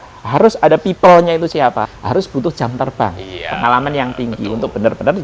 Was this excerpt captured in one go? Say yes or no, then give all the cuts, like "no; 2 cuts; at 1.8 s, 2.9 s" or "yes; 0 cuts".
no; 1 cut; at 1.9 s